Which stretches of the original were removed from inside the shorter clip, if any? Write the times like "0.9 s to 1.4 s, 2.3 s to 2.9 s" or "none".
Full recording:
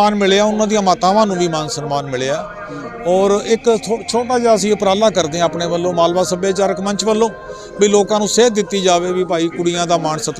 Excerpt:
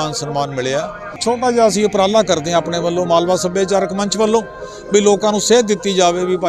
2.7 s to 4.0 s